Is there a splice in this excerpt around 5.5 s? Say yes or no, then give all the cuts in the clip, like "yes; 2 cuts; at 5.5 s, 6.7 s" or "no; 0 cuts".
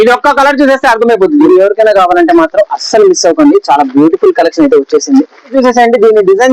yes; 2 cuts; at 1.5 s, 5.5 s